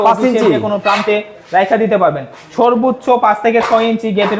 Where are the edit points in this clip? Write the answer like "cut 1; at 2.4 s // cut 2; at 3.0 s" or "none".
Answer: none

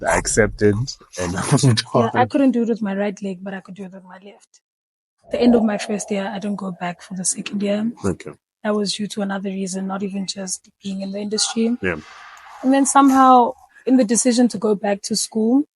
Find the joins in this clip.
cut 1; at 5.3 s

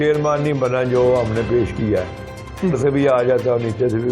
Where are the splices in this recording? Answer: cut 1; at 2.7 s

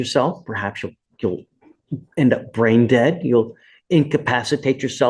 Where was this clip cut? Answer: none

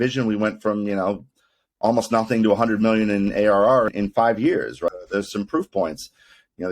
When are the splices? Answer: cut 1; at 3.9 s // cut 2; at 4.9 s

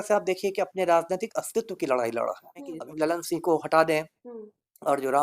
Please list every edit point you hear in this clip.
cut 1; at 2.7 s

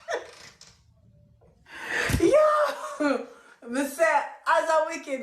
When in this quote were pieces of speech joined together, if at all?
none

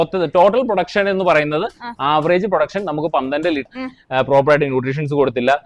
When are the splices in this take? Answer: cut 1; at 3.7 s

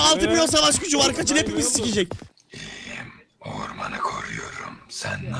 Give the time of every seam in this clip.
cut 1; at 2.3 s

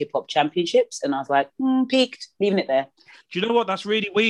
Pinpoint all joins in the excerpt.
cut 1; at 3.1 s

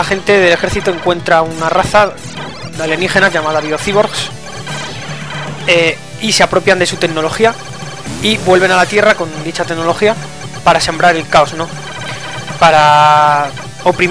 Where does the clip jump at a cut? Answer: cut 1; at 9.5 s

